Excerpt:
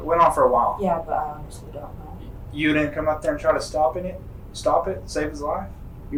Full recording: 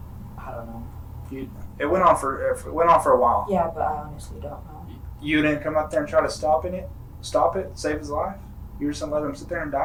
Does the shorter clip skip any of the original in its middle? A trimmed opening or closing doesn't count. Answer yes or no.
no